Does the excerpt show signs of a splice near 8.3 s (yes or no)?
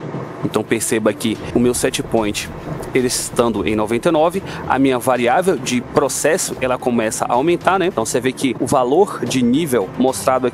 yes